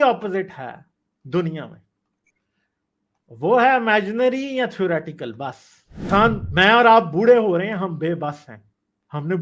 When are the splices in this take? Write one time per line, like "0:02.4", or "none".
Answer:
0:06.1